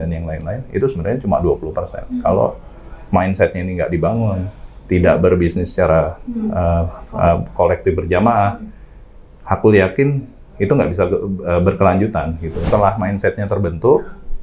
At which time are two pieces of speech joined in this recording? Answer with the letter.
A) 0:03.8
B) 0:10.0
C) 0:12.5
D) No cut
C